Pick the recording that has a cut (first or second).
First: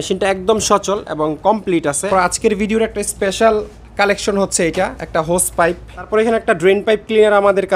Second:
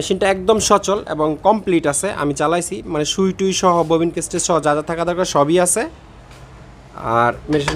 first